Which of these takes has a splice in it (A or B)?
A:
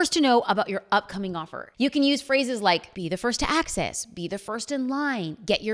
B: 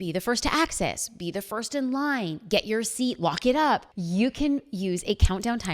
B